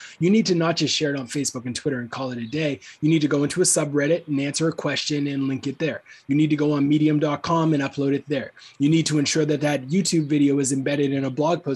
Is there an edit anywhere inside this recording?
no; 0 cuts

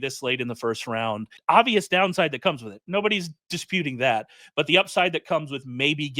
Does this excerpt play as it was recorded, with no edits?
no; 1 cut; at 1.3 s

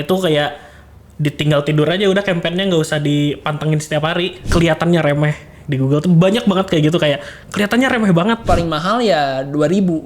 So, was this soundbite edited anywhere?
yes; 2 cuts; at 4.4 s, 8.4 s

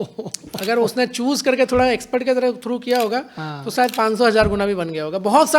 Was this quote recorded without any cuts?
yes; 0 cuts

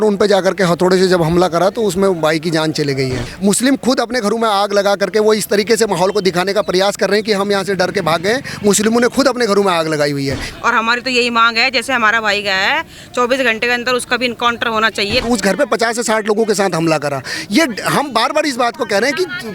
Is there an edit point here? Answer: yes; 3 cuts; at 3.3 s, 10.4 s, 15.2 s

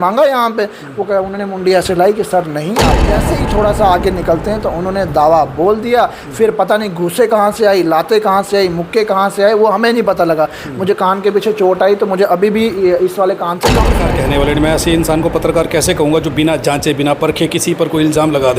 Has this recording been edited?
yes; 2 cuts; at 3.1 s, 13.9 s

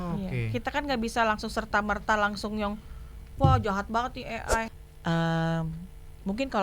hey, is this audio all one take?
no; 1 cut; at 4.7 s

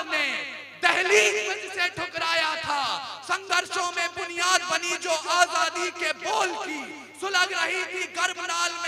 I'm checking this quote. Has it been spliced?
no; 0 cuts

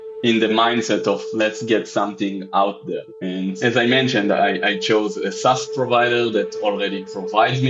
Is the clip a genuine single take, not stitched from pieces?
yes; 0 cuts

